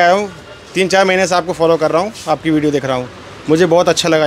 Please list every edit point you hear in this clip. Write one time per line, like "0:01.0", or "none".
none